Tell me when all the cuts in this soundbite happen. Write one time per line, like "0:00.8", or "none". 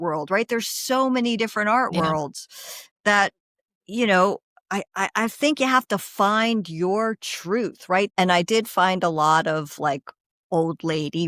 0:08.1